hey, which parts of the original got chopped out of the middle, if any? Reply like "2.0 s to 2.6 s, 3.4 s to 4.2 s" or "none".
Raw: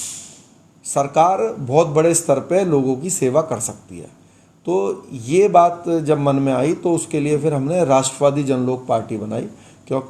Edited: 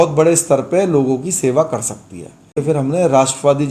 4.4 s to 7.4 s